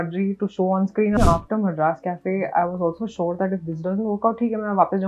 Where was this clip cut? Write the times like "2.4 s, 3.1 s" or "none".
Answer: 1.2 s